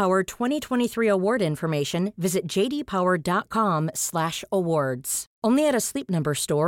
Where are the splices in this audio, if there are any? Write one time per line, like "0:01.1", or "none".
none